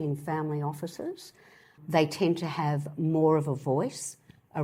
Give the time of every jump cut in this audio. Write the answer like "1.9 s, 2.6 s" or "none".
1.8 s